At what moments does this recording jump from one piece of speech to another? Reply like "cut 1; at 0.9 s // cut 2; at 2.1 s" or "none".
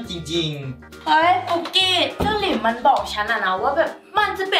cut 1; at 0.9 s